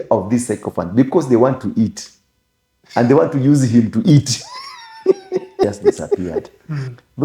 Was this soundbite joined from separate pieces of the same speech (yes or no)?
yes